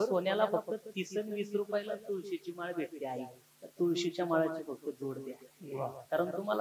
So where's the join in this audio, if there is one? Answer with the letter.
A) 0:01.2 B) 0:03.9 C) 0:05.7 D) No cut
D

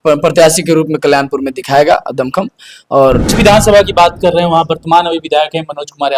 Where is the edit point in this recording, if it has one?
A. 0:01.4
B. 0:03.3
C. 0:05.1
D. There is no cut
B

